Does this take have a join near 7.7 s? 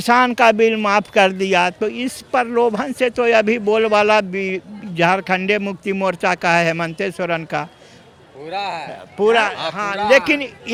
no; 0 cuts

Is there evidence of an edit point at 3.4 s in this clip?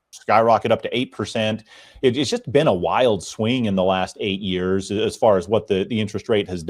no; 0 cuts

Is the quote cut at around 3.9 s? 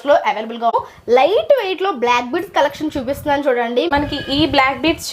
yes; 2 cuts; at 0.7 s, 3.9 s

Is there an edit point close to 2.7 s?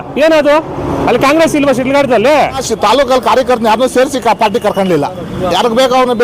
yes; 1 cut; at 2.7 s

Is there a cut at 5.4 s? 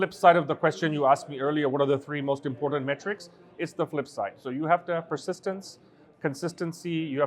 no; 0 cuts

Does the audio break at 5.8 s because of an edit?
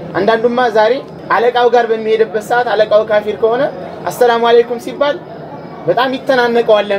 no; 1 cut; at 1.1 s

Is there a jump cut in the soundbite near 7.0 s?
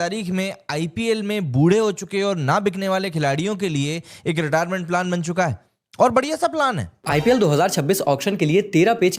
yes; 1 cut; at 7.0 s

